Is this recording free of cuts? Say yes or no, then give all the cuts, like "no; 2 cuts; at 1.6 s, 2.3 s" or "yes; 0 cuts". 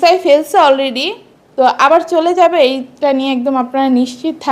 yes; 0 cuts